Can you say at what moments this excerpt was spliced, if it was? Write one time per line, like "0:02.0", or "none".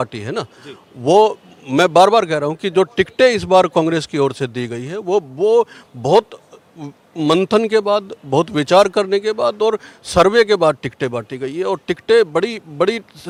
none